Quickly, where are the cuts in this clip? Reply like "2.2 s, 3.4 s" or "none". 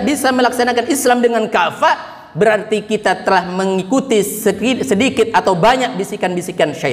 none